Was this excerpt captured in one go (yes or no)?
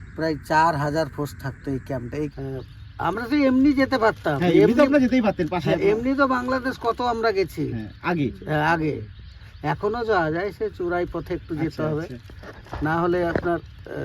no